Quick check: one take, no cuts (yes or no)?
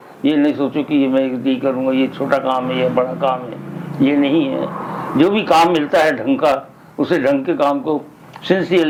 yes